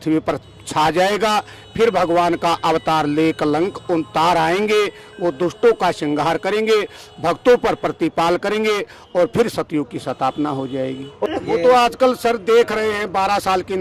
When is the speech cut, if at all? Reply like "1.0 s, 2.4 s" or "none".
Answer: none